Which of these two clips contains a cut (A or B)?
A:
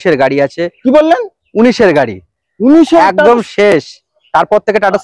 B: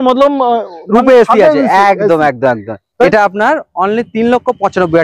B